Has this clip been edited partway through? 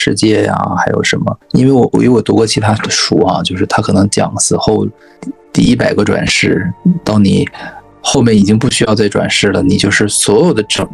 yes; 2 cuts; at 1.4 s, 5.3 s

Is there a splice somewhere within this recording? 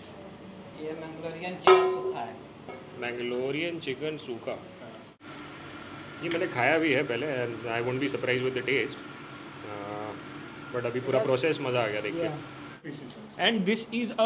no; 0 cuts

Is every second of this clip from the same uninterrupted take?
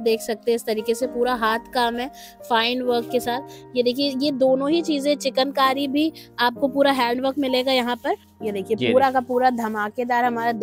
no; 1 cut; at 8.3 s

